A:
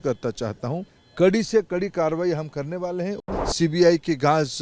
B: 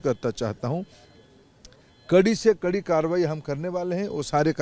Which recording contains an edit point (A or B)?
A